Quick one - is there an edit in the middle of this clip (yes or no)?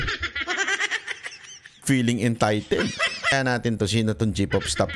yes